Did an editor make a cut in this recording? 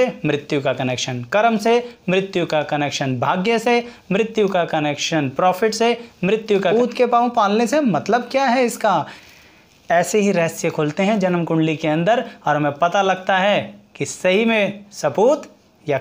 yes; 2 cuts; at 6.7 s, 9.2 s

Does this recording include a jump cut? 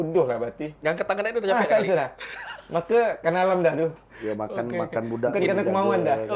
no; 0 cuts

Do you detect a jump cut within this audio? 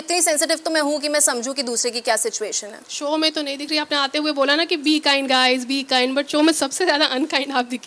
no; 0 cuts

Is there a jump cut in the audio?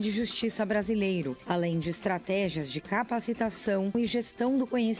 yes; 2 cuts; at 1.4 s, 3.9 s

